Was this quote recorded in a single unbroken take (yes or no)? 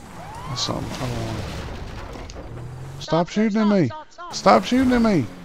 yes